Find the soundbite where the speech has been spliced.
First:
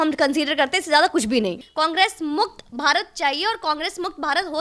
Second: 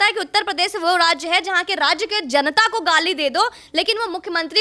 first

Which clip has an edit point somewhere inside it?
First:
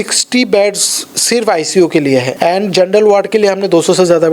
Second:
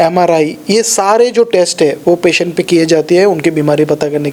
first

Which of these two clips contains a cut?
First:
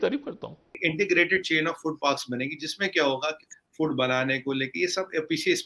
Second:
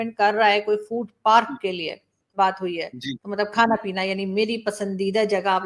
first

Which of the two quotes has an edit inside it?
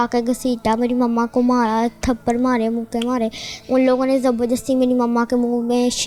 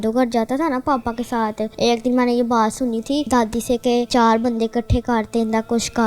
second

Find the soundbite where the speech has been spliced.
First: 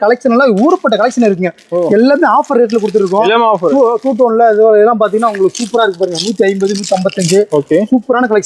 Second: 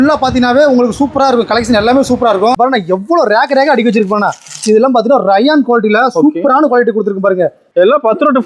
second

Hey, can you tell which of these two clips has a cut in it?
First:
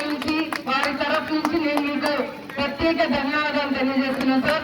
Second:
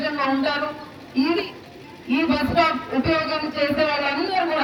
first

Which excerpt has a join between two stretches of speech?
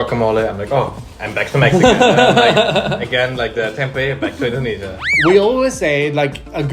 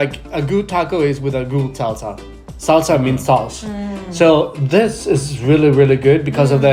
first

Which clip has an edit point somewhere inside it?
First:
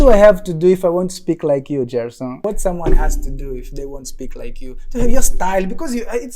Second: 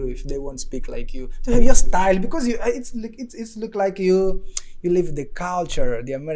first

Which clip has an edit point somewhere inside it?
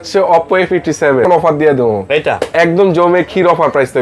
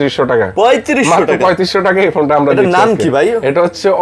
first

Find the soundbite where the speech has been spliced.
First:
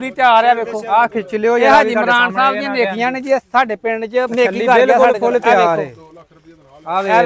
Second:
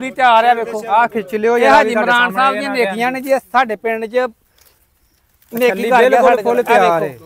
first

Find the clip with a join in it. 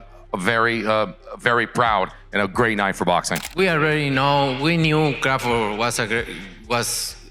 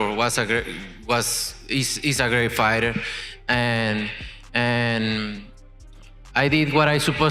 first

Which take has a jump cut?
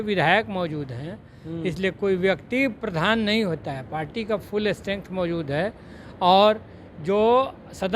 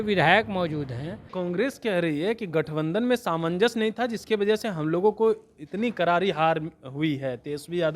second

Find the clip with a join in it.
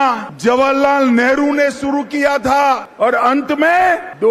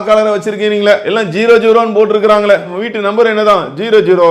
second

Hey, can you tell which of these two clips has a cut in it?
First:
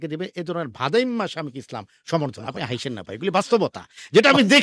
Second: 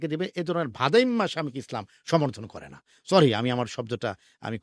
first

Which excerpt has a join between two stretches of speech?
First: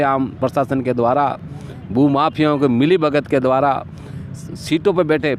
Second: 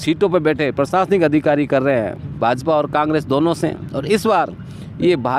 second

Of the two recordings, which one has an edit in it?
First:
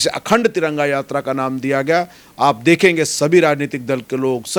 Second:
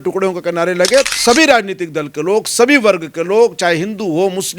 second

